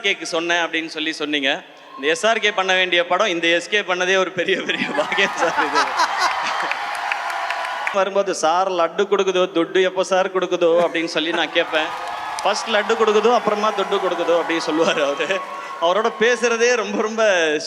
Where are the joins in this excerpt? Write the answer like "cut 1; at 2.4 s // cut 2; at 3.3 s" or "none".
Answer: cut 1; at 7.9 s

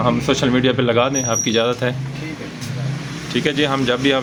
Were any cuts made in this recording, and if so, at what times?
none

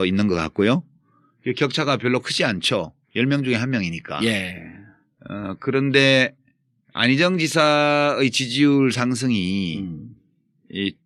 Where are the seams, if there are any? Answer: none

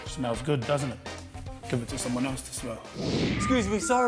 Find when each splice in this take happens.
cut 1; at 3.2 s

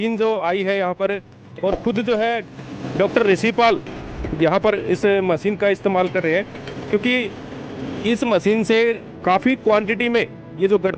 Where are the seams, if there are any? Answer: none

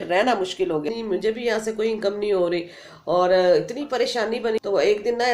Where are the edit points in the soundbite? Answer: cut 1; at 1.1 s // cut 2; at 4.6 s

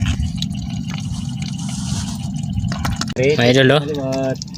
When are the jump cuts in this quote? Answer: cut 1; at 3.2 s

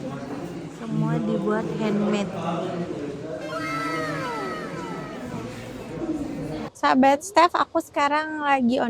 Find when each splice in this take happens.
cut 1; at 6.7 s

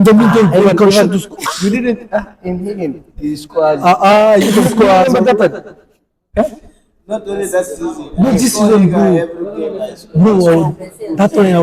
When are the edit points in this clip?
none

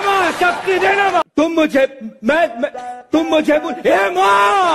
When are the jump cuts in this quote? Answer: cut 1; at 1.2 s

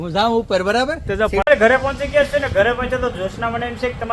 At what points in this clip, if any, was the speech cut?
cut 1; at 1.4 s

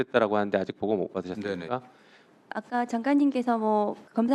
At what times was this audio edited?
cut 1; at 2.5 s

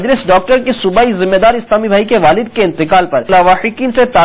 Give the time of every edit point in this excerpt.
cut 1; at 3.3 s

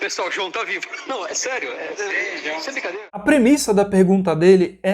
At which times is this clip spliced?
cut 1; at 3.2 s

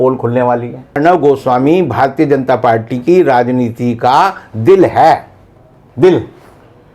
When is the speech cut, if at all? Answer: cut 1; at 1.0 s

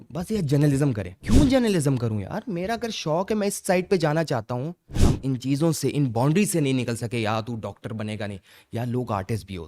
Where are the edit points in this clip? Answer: cut 1; at 1.1 s // cut 2; at 4.9 s

